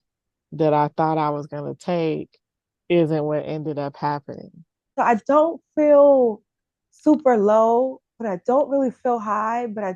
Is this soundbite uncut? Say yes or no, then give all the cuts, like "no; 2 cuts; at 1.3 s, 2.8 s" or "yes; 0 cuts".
no; 1 cut; at 4.9 s